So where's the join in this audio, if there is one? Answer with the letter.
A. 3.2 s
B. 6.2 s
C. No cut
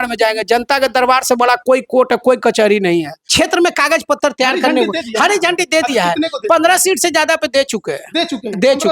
A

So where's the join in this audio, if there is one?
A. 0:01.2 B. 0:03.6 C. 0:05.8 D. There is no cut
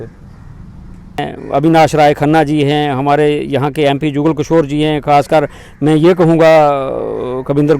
A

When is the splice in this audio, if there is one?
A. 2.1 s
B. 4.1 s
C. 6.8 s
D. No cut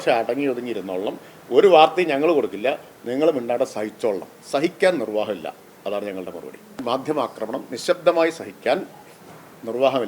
C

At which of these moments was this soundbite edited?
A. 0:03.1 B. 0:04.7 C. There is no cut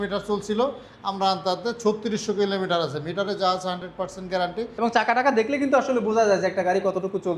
B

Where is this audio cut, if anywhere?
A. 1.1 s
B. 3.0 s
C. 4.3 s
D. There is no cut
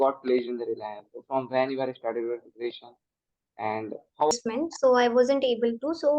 C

